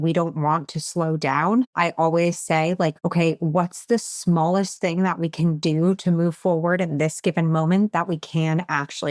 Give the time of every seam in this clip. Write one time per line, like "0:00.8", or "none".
0:01.7
0:03.0